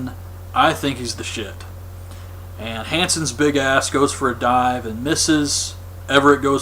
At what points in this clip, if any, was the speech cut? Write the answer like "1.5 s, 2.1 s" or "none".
3.7 s